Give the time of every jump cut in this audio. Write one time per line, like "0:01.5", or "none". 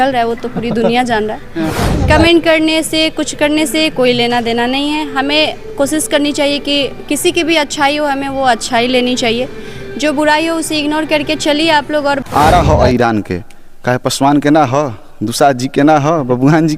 0:01.7
0:12.2